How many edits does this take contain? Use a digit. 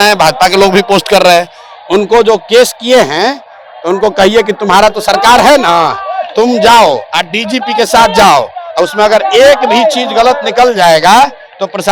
0